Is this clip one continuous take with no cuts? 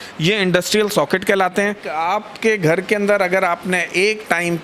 no; 1 cut; at 1.9 s

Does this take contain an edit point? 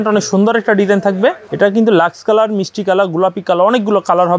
yes; 1 cut; at 1.4 s

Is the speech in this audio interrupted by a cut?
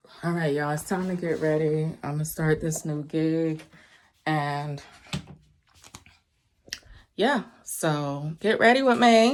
no; 0 cuts

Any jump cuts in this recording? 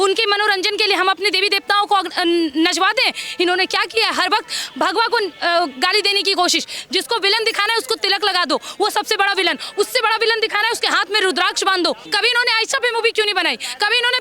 yes; 1 cut; at 12.1 s

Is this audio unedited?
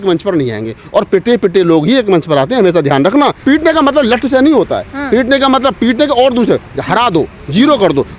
no; 1 cut; at 3.4 s

